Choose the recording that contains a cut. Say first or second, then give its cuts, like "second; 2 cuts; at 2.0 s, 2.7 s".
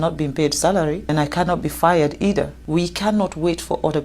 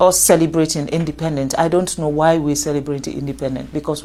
first; 2 cuts; at 1.1 s, 2.6 s